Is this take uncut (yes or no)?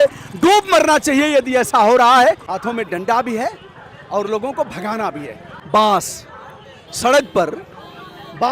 no